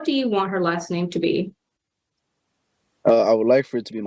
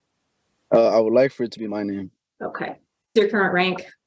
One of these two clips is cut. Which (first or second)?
second